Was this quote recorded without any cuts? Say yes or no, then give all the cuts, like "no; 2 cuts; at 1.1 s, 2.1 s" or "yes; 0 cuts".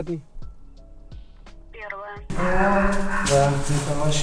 no; 1 cut; at 2.3 s